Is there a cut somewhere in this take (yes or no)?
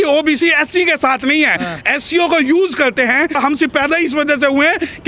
yes